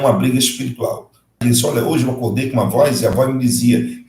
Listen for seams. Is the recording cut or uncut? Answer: cut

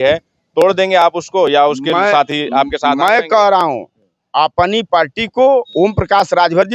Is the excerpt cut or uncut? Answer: uncut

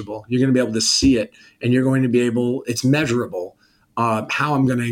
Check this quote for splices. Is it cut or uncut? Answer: uncut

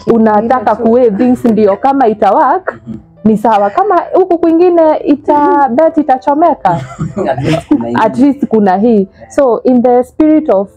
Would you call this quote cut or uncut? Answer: uncut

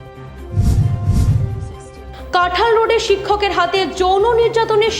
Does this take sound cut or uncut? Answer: uncut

